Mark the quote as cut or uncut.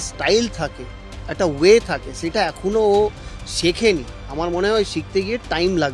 cut